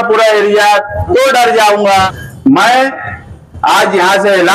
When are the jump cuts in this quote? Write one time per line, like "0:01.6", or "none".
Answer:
0:02.2